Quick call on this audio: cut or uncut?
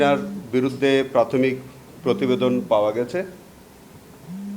uncut